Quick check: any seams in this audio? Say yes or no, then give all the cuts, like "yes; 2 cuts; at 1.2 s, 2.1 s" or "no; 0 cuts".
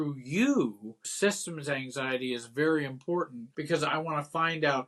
yes; 1 cut; at 1.0 s